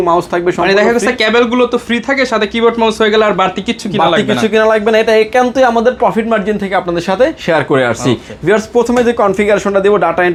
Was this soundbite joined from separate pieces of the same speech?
no; 0 cuts

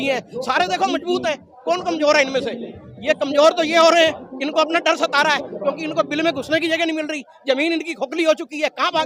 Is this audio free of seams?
yes; 0 cuts

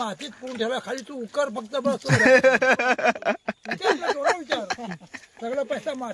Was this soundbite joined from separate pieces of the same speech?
no; 0 cuts

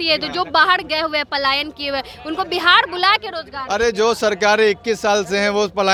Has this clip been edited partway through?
no; 0 cuts

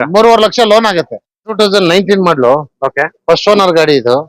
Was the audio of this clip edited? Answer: yes; 1 cut; at 1.5 s

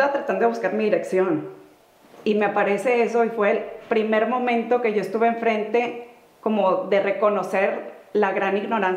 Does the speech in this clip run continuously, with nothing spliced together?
yes; 0 cuts

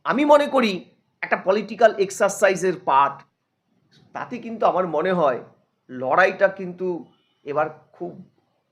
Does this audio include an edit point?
yes; 1 cut; at 3.3 s

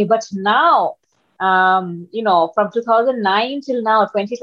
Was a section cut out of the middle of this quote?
no; 0 cuts

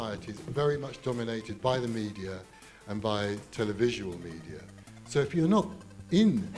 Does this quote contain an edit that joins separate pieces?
no; 0 cuts

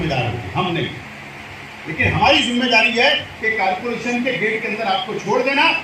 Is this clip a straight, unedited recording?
yes; 0 cuts

